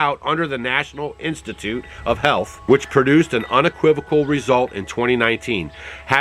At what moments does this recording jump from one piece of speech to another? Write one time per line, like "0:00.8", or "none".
0:02.5